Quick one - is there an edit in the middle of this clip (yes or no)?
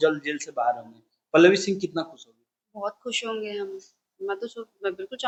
no